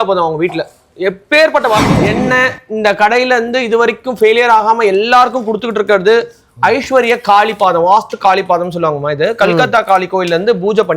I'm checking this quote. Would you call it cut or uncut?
cut